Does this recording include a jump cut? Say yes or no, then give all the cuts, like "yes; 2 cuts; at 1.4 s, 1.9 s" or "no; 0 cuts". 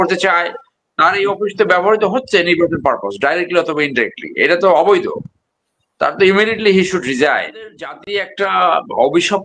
yes; 1 cut; at 7.9 s